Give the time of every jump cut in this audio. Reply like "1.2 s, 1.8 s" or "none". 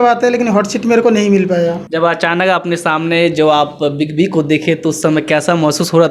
1.8 s